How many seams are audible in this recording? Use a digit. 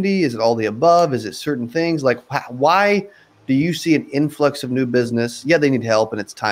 0